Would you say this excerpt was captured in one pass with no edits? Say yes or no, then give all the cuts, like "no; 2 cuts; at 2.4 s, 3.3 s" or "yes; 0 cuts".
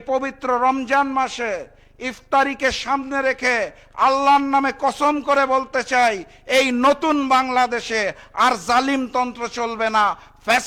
yes; 0 cuts